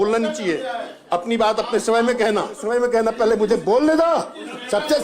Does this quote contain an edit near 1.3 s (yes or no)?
no